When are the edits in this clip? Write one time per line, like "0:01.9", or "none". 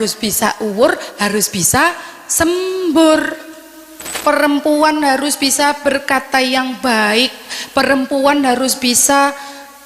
0:04.1